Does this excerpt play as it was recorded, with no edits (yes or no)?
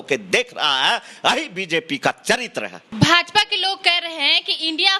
yes